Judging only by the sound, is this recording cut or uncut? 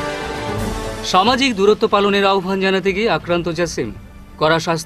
cut